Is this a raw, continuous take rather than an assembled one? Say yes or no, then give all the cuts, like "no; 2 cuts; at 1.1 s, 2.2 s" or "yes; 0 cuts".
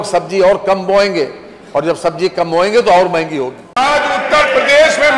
no; 1 cut; at 3.8 s